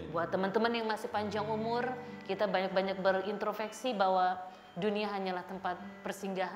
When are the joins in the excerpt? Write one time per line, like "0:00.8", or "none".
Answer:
none